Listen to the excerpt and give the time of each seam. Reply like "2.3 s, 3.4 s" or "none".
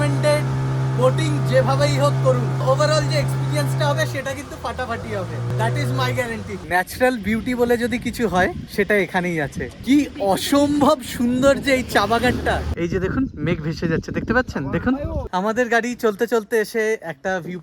2.6 s, 5.5 s, 6.5 s, 8.6 s, 9.7 s, 12.7 s, 15.2 s

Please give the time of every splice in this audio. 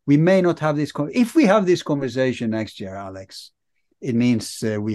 none

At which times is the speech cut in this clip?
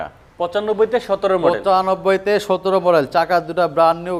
none

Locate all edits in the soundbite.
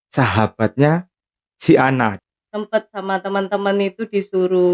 2.2 s

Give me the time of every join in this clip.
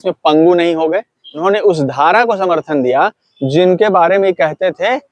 1.4 s

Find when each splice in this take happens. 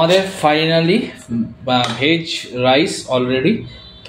none

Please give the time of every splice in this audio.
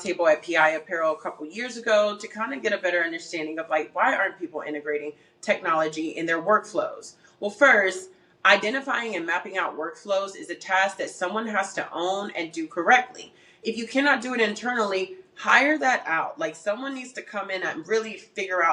none

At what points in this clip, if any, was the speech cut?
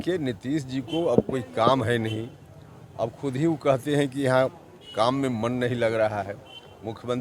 none

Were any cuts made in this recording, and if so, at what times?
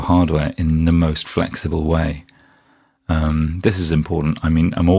1.1 s

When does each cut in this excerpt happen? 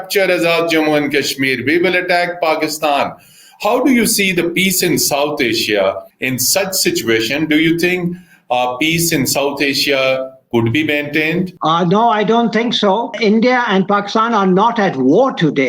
6.1 s, 13.1 s

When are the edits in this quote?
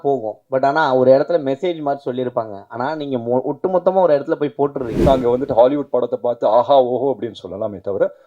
5.0 s

